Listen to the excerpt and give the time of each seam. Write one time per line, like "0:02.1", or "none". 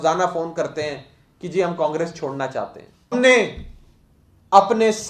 0:03.1